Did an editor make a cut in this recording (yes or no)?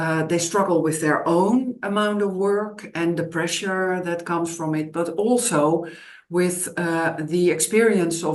no